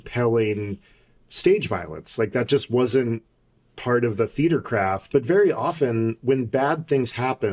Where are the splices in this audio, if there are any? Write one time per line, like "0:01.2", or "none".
0:05.0